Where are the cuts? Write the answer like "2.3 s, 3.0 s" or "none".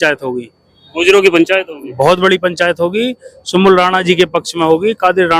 none